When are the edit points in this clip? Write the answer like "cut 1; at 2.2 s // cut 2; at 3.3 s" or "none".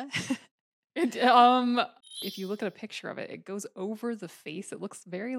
cut 1; at 2.2 s